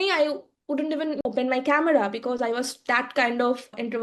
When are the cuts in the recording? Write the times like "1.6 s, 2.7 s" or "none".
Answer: 1.2 s